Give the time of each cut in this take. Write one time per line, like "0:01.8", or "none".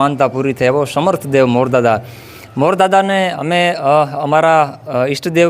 none